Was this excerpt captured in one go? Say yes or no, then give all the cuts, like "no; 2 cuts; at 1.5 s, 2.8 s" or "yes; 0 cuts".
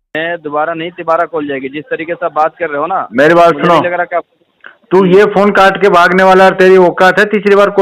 yes; 0 cuts